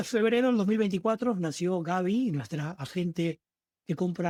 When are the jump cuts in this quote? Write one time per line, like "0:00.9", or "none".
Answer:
none